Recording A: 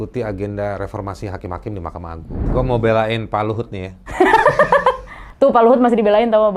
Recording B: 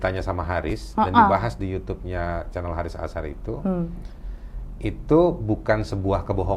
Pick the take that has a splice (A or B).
A